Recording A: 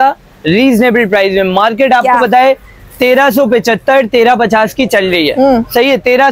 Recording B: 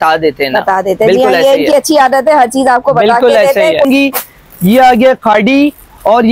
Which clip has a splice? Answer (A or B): B